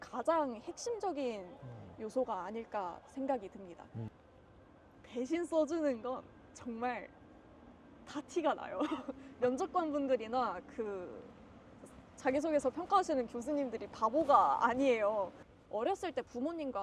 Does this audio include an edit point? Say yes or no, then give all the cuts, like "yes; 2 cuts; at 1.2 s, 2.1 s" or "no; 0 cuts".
yes; 2 cuts; at 4.1 s, 15.4 s